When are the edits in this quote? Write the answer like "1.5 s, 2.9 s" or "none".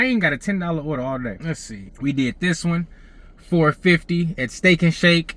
none

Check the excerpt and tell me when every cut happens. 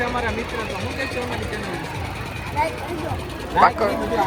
none

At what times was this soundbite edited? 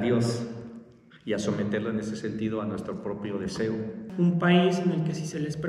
4.1 s

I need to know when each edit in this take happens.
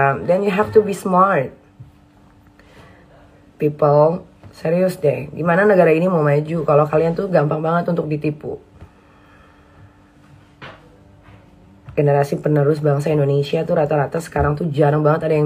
none

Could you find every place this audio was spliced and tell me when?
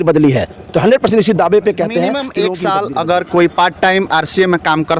2.3 s

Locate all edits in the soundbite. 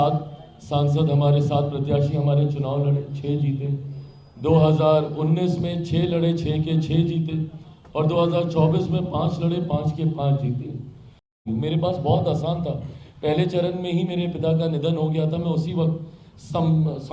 11.3 s

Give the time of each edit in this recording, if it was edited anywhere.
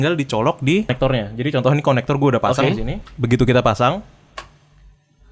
0.9 s, 3.1 s

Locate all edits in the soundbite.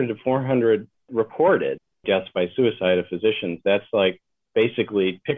1.0 s, 2.0 s

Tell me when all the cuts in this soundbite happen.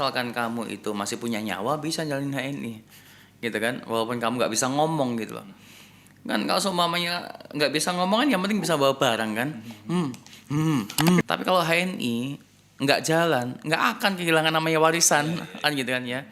11.2 s

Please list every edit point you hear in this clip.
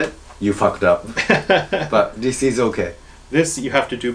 none

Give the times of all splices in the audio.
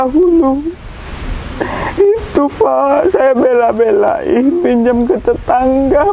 none

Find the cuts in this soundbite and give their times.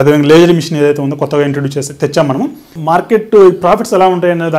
2.7 s

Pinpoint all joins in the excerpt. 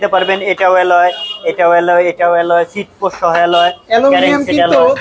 none

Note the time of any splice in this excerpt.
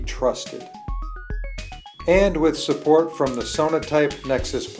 none

